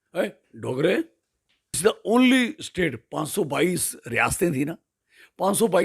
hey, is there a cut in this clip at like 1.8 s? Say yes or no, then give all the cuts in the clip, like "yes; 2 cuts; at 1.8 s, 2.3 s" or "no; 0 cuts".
yes; 1 cut; at 1.8 s